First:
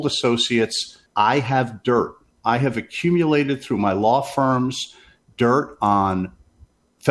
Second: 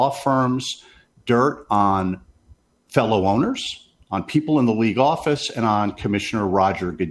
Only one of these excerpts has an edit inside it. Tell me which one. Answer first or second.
first